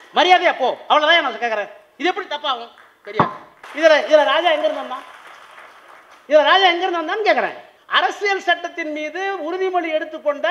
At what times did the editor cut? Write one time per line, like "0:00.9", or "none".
0:03.6
0:07.7